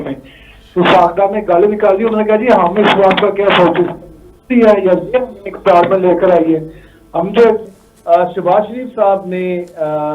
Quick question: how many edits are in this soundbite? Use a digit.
1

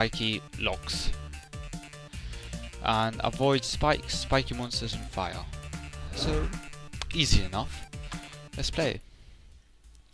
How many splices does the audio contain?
0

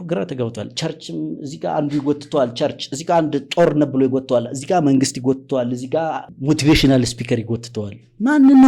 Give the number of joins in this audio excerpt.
1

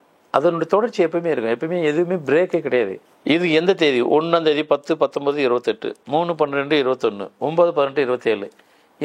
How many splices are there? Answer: 1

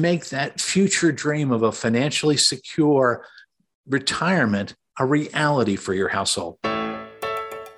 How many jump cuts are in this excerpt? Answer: 1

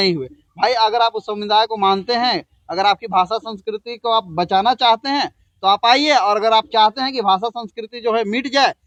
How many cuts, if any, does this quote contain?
0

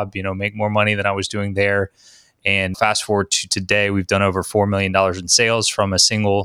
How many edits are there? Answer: 1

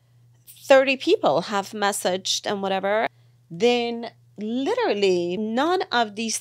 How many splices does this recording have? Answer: 2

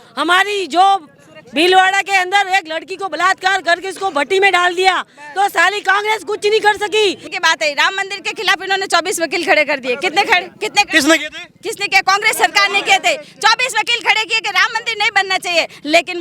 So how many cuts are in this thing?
1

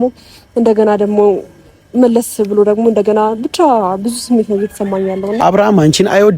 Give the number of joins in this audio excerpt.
1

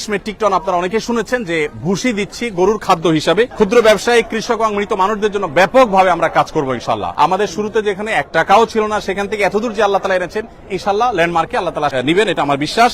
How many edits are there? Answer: 3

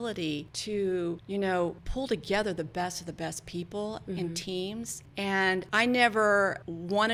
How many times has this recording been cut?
0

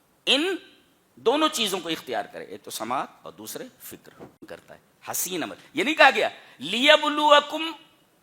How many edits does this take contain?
1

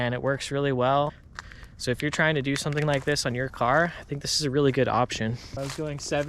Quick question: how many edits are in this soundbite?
2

